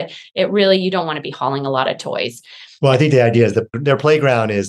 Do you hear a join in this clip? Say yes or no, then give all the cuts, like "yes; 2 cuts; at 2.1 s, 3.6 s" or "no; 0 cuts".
yes; 1 cut; at 3.8 s